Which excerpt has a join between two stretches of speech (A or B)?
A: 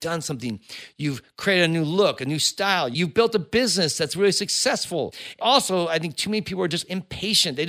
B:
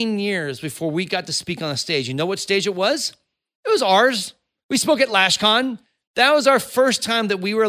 A